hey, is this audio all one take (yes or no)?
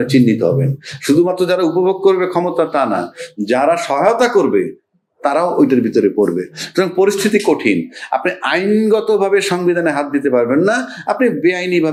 yes